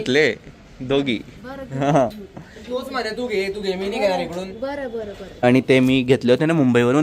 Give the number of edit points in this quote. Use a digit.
1